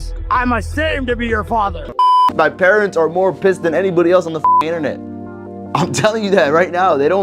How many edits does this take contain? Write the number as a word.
one